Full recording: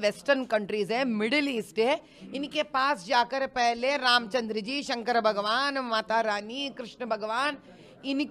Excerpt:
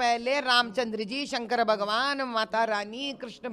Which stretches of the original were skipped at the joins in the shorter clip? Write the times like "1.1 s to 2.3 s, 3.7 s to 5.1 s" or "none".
none